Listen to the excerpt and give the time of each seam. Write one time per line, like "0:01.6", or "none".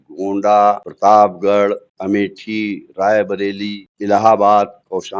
0:00.9
0:01.9
0:03.9